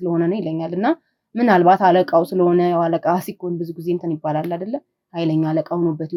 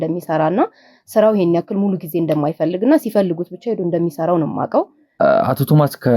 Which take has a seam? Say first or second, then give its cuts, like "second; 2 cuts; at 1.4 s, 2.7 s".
second; 1 cut; at 5.0 s